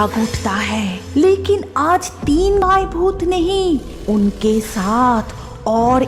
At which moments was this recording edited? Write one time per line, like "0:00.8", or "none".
0:02.6